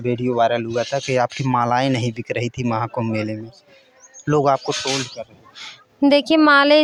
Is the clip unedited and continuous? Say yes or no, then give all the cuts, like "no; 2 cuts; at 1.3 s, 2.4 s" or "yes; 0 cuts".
yes; 0 cuts